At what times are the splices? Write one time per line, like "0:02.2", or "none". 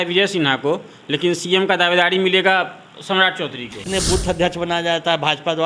0:03.8